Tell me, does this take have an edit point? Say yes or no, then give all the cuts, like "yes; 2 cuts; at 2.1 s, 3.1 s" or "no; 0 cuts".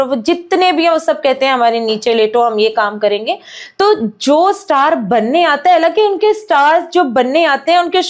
no; 0 cuts